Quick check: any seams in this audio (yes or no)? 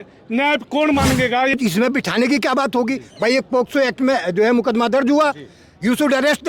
yes